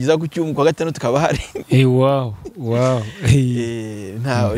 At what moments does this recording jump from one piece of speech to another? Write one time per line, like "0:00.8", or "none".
none